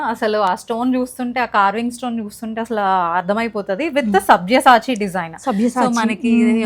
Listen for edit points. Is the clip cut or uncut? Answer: uncut